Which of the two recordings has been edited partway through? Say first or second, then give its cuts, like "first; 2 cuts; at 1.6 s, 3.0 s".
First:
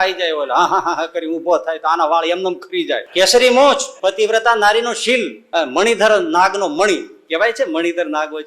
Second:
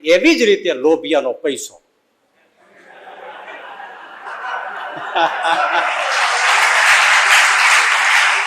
first; 3 cuts; at 3.1 s, 3.9 s, 5.4 s